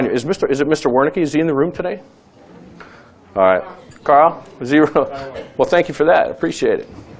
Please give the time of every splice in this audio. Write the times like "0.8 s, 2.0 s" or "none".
2.6 s